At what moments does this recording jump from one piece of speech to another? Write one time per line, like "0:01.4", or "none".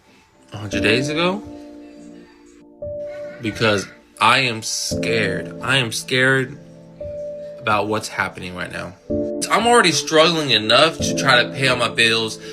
0:09.4